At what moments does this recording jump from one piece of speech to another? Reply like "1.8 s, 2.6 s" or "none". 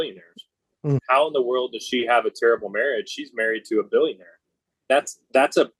1.0 s, 4.9 s